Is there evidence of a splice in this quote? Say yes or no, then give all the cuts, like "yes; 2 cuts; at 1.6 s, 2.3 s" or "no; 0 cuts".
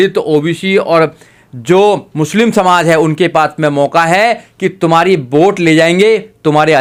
no; 0 cuts